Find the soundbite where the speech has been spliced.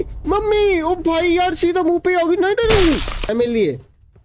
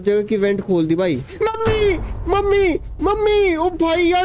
first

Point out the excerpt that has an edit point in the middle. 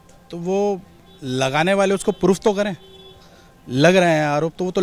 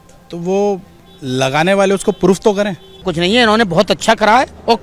second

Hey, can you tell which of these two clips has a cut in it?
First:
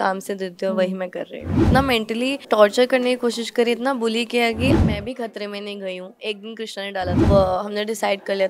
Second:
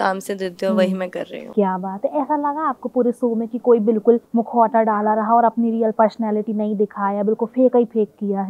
first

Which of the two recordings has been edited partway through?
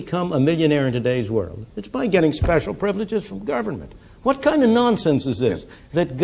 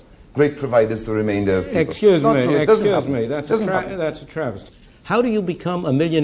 second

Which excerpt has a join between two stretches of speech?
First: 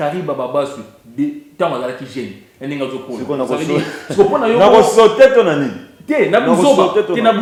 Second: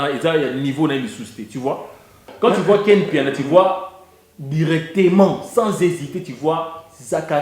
second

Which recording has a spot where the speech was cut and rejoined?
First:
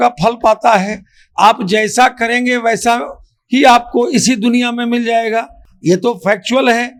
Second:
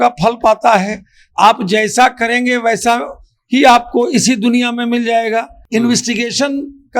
second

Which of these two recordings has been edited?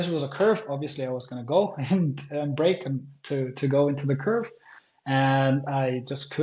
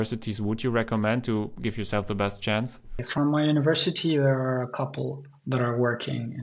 second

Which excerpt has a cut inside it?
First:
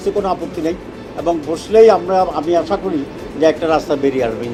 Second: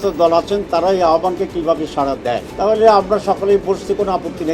second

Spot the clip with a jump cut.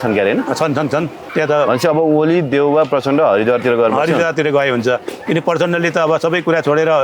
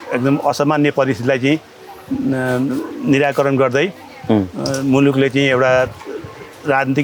first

